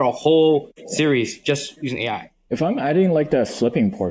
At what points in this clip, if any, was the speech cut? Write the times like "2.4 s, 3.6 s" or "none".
2.4 s

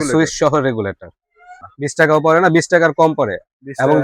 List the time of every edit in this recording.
1.6 s

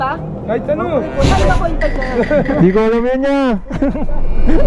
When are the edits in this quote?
none

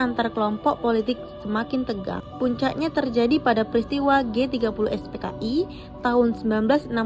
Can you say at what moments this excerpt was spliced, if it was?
2.3 s

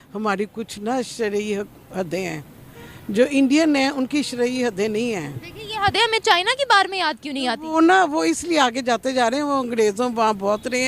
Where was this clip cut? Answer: none

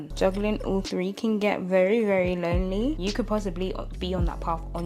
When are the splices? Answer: none

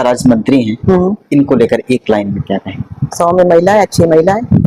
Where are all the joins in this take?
none

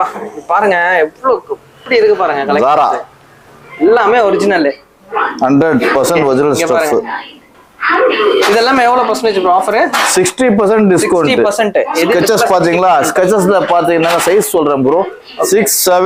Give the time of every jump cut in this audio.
none

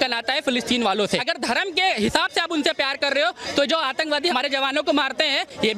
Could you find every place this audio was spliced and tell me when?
1.3 s, 4.3 s

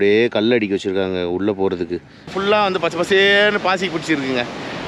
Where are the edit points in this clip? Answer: 2.3 s

